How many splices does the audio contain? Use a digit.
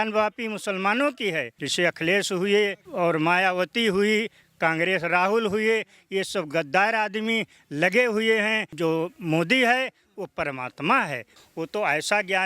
3